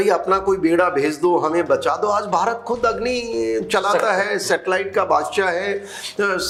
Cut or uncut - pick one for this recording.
uncut